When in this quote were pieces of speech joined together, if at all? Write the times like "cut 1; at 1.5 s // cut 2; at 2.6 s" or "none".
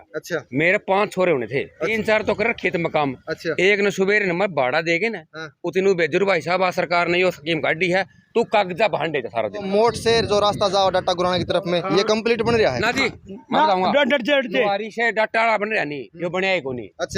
cut 1; at 1.9 s // cut 2; at 9.7 s